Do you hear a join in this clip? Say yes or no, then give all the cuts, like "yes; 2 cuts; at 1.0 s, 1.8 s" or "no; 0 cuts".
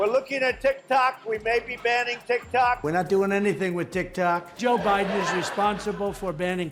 no; 0 cuts